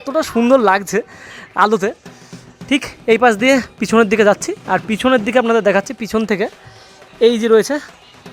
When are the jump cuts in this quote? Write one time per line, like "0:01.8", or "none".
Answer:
none